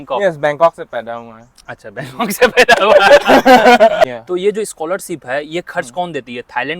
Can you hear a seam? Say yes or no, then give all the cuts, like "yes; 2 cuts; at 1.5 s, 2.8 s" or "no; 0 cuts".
yes; 1 cut; at 4.1 s